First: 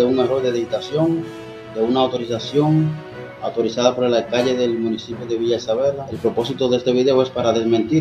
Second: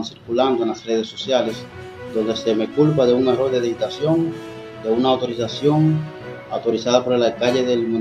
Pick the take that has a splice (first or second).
first